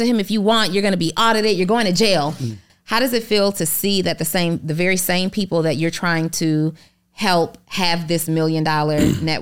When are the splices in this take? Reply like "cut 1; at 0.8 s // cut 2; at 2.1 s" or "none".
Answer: cut 1; at 2.7 s